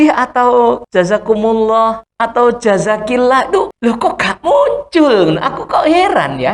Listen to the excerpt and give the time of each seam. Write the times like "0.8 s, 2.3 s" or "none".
0.8 s, 2.1 s, 3.7 s